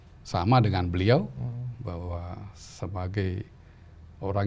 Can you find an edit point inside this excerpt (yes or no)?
no